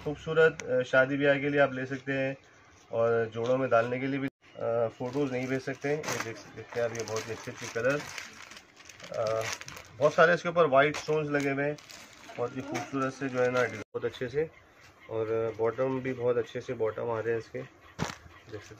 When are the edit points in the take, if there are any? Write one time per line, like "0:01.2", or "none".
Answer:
0:04.4
0:13.9